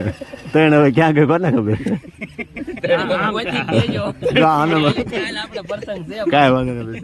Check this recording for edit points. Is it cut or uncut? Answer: uncut